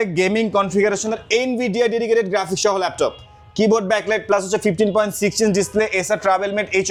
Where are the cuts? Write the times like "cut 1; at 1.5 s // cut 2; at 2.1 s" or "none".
none